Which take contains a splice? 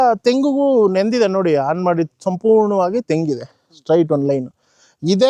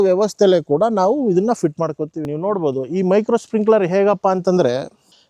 second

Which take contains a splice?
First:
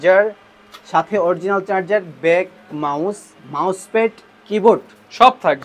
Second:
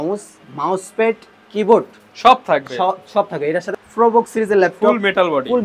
second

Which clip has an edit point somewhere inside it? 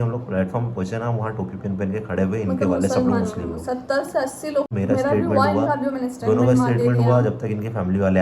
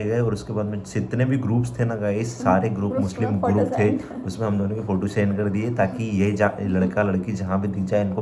first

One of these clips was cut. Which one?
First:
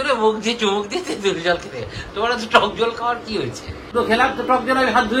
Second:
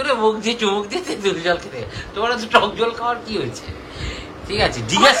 first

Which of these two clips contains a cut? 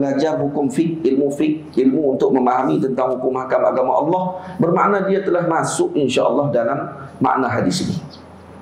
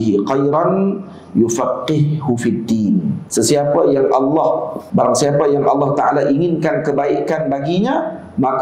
second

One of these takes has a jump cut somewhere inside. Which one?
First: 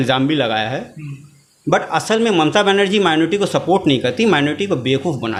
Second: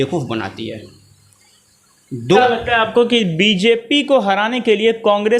second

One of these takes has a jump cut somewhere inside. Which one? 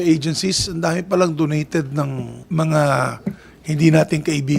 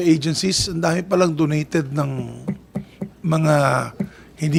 first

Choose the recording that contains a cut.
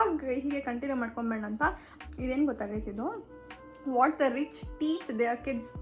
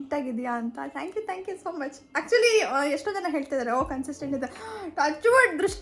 first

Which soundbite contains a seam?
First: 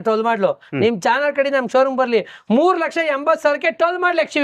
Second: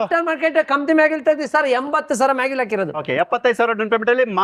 second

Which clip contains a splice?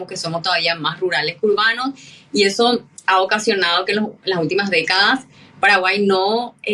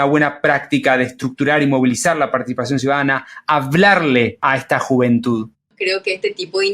second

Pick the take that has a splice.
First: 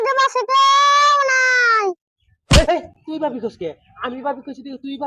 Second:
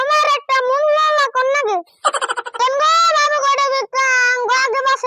second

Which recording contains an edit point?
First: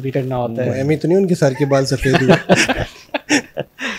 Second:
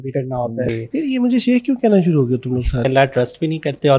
second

